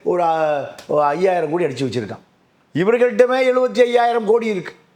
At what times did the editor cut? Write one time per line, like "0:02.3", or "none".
none